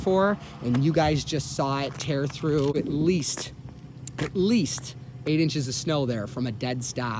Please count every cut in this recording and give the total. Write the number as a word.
one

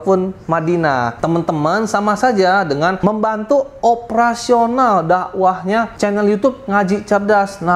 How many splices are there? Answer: three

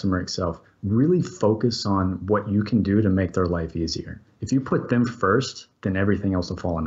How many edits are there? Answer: one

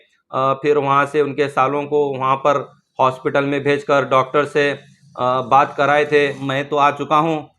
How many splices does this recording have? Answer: one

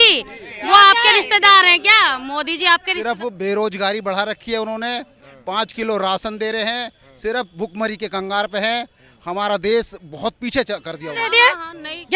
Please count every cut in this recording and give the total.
two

